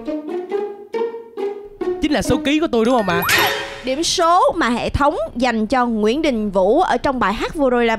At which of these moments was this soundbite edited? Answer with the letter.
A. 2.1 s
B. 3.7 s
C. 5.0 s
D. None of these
B